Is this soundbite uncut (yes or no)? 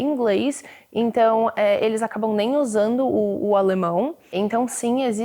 no